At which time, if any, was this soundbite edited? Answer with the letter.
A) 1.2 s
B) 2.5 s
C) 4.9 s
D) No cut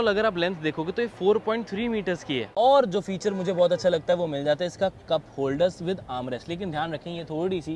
B